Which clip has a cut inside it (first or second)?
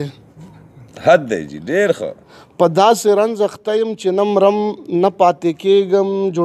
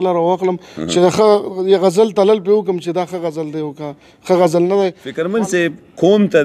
second